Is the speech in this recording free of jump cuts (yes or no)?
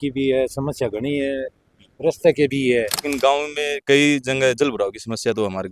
no